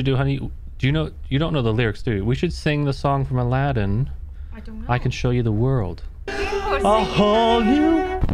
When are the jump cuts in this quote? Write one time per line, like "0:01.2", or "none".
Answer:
0:06.3